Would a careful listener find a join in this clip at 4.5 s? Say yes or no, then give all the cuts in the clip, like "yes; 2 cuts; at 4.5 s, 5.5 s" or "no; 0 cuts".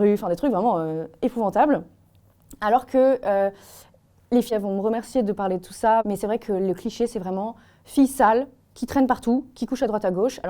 yes; 2 cuts; at 4.5 s, 6.1 s